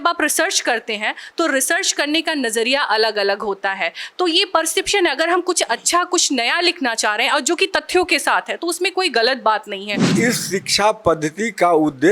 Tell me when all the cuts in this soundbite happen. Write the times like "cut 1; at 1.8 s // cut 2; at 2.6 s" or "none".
cut 1; at 10.0 s